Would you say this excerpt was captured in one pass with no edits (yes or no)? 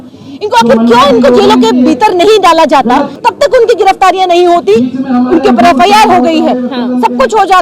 no